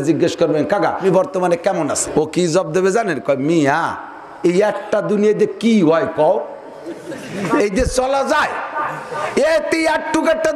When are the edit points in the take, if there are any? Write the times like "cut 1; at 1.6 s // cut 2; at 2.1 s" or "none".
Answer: cut 1; at 1.0 s // cut 2; at 2.0 s